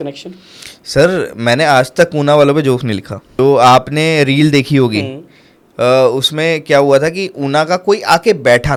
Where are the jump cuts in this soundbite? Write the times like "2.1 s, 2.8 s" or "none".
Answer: none